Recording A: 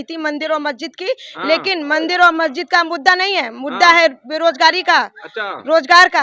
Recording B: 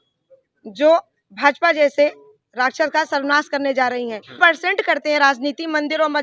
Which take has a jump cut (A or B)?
B